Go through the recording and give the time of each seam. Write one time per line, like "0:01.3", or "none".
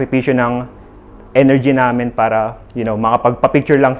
0:02.6